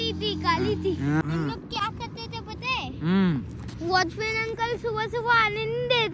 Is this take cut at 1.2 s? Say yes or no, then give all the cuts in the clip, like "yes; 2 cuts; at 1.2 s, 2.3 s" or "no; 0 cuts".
yes; 1 cut; at 1.2 s